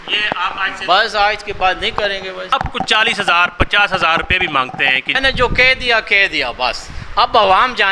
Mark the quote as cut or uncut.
cut